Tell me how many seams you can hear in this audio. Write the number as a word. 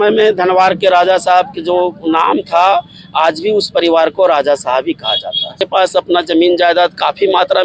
one